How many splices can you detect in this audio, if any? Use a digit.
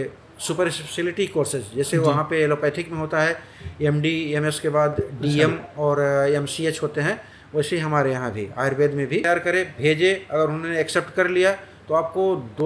1